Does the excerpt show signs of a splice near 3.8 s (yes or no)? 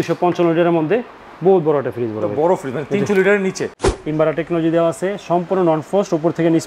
yes